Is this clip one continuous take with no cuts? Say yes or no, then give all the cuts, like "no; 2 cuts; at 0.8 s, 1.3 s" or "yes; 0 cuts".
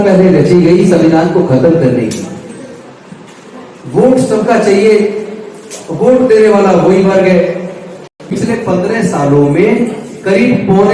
no; 1 cut; at 8.1 s